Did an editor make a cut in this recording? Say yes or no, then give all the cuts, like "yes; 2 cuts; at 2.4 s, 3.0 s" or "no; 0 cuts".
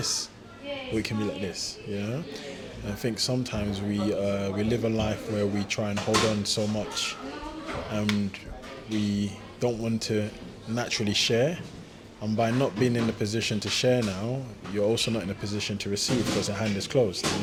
no; 0 cuts